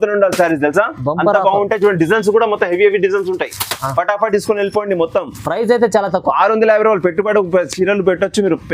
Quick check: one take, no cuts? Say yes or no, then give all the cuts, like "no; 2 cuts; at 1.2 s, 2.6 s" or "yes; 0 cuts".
yes; 0 cuts